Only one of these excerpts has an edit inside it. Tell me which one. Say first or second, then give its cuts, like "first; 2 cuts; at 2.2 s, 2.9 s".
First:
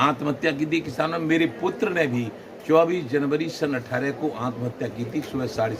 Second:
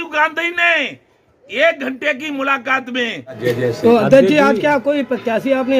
second; 1 cut; at 3.4 s